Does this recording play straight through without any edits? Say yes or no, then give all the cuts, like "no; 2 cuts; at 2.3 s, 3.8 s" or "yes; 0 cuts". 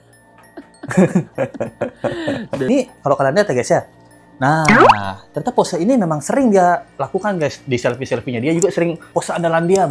no; 2 cuts; at 2.7 s, 9.0 s